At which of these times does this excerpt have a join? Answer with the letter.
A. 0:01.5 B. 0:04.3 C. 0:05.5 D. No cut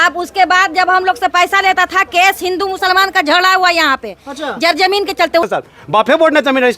C